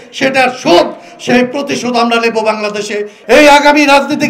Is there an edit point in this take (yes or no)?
yes